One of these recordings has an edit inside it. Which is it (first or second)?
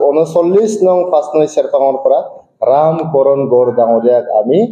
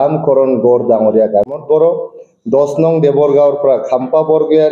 second